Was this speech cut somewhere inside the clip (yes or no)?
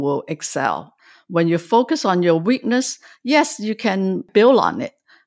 yes